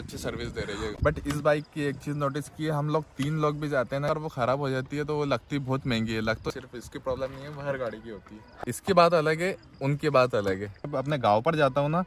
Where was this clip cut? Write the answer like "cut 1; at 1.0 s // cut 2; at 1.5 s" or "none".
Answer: cut 1; at 0.9 s // cut 2; at 4.1 s // cut 3; at 6.5 s // cut 4; at 8.4 s // cut 5; at 10.8 s

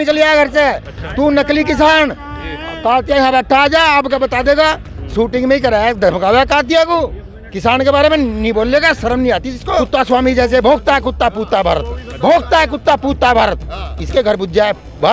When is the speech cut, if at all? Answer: cut 1; at 9.6 s

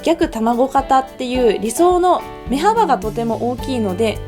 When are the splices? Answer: cut 1; at 2.3 s

